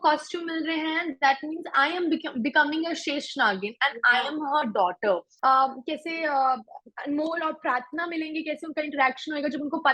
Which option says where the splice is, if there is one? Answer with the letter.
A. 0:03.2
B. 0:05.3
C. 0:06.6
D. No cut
B